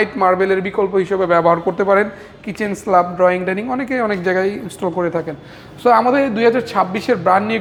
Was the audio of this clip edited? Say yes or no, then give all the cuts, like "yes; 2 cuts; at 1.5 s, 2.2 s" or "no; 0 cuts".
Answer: no; 0 cuts